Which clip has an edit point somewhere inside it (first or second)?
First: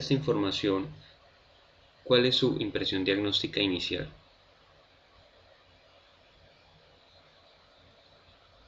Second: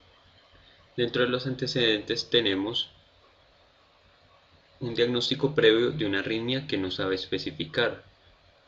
second